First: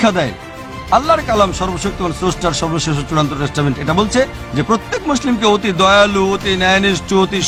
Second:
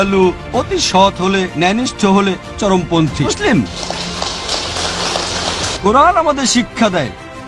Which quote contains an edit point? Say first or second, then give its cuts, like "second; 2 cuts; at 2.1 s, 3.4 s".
second; 1 cut; at 5.8 s